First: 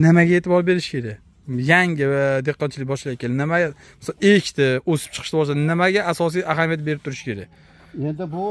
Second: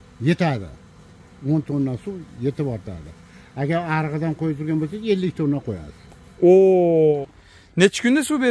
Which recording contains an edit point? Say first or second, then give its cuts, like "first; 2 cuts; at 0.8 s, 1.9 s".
second; 1 cut; at 7.2 s